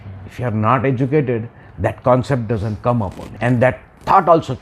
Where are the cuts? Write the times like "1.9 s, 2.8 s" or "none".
3.2 s